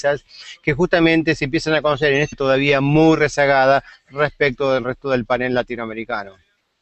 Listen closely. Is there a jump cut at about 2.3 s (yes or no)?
no